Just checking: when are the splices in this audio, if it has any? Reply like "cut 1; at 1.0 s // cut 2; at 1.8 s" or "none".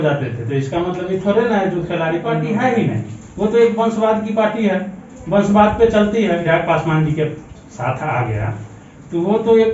cut 1; at 2.4 s // cut 2; at 6.4 s